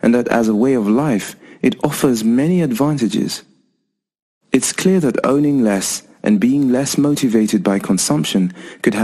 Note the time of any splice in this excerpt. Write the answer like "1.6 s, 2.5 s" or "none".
none